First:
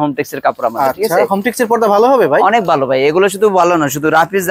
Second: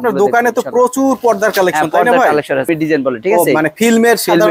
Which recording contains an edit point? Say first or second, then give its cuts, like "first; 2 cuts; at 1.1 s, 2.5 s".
second; 1 cut; at 2.7 s